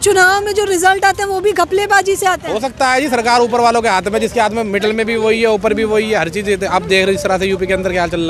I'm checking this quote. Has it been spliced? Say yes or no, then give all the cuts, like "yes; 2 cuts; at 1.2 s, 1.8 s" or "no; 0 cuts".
no; 0 cuts